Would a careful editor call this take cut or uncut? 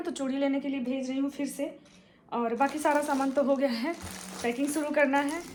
uncut